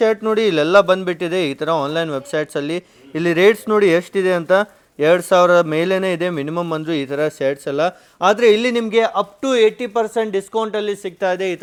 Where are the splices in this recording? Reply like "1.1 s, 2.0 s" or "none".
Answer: none